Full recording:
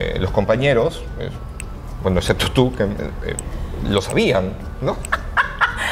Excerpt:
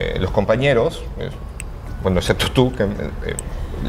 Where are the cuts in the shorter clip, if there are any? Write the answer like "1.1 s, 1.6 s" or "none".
none